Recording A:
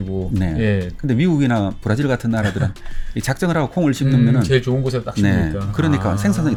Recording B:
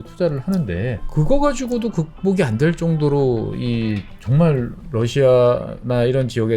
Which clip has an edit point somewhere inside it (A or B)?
B